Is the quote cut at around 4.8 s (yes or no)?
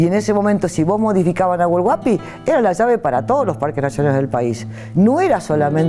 yes